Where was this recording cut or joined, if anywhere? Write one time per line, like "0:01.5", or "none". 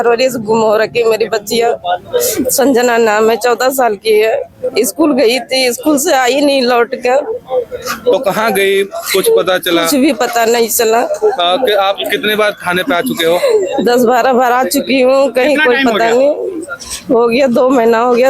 none